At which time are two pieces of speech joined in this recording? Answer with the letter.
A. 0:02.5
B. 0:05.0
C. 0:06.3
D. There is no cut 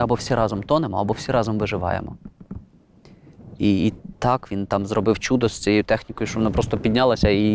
D